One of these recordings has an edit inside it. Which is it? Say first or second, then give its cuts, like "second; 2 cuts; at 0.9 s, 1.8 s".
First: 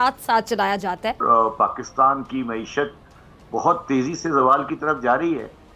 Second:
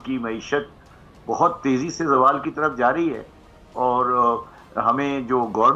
first; 1 cut; at 1.2 s